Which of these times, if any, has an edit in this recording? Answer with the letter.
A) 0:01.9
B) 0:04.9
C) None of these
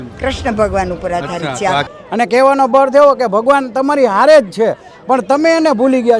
A